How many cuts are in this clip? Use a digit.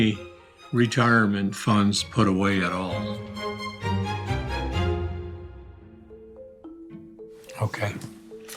0